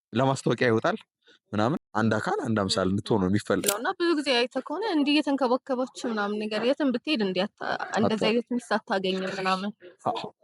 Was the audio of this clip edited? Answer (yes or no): yes